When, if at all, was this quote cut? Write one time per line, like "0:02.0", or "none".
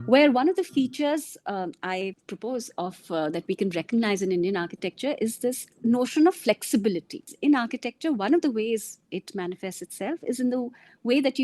0:02.3
0:05.7
0:07.3